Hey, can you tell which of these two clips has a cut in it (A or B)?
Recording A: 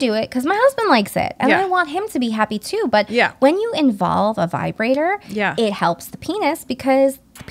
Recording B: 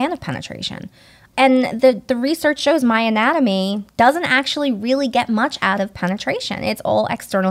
B